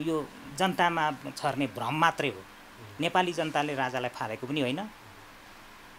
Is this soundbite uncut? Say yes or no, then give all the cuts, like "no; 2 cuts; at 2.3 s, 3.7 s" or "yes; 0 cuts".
yes; 0 cuts